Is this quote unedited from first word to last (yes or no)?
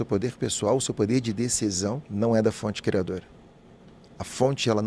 yes